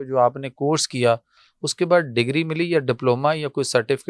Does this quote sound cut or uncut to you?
uncut